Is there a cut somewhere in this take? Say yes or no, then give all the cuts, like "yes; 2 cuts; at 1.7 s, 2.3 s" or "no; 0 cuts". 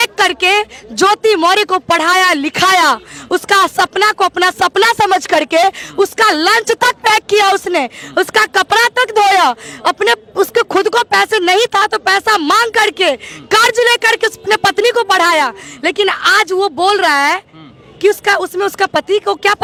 no; 0 cuts